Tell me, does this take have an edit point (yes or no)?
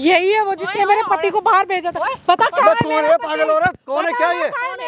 no